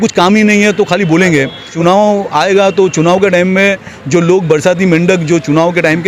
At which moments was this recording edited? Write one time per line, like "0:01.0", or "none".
0:01.7